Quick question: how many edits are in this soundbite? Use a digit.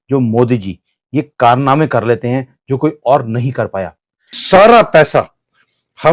1